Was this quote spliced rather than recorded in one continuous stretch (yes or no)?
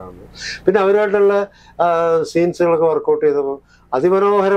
no